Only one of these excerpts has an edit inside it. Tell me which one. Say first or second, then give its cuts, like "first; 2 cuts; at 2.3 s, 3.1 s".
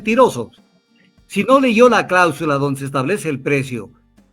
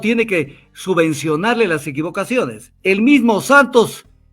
second; 1 cut; at 2.6 s